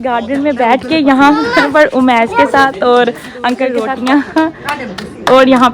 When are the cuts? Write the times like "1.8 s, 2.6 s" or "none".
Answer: 3.8 s